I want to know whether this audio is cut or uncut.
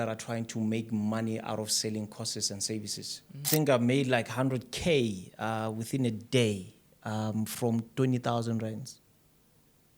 cut